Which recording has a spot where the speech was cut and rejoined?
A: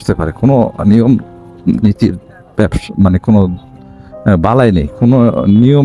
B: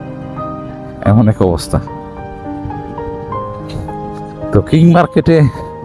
B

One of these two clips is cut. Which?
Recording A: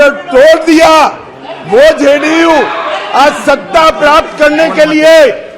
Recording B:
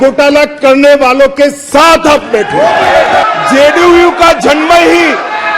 B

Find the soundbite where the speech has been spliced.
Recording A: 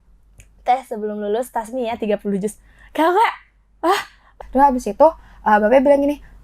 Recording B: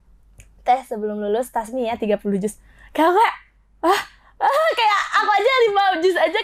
A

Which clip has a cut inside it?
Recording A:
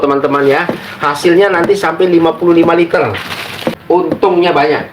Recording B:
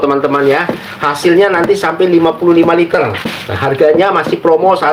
A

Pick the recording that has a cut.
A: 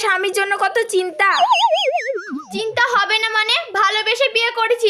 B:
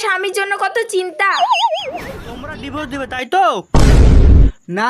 B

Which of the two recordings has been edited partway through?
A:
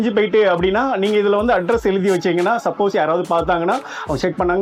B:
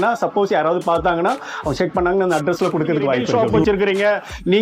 B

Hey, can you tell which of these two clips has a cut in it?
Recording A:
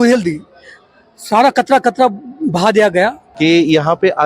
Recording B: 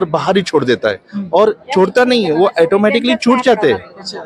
A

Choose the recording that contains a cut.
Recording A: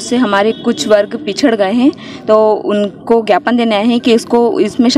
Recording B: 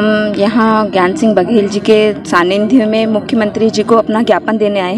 A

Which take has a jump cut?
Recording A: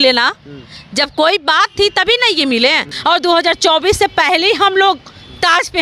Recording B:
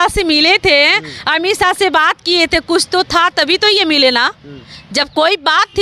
A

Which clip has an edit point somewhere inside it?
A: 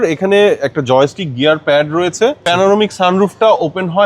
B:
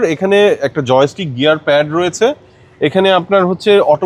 A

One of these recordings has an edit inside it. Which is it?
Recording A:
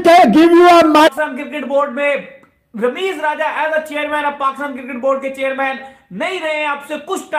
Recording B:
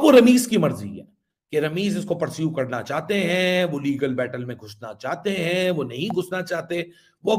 A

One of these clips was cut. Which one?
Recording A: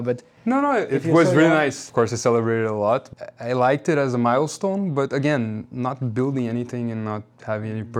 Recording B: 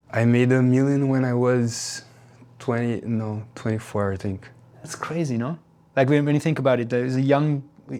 A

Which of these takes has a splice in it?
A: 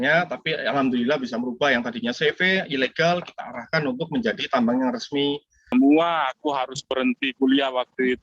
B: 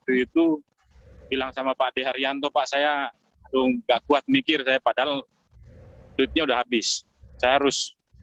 A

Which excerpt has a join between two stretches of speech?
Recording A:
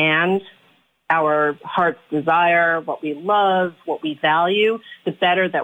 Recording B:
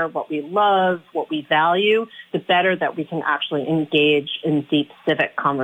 A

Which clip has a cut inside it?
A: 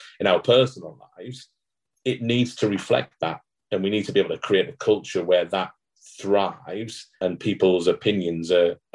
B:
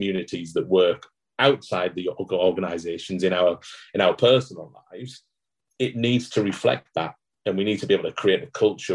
A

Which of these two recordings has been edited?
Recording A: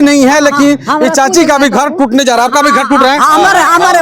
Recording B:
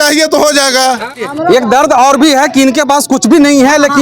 B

